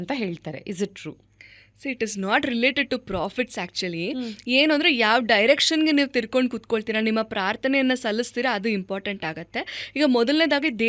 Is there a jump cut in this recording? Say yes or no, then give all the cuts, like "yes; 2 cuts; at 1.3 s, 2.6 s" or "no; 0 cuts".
no; 0 cuts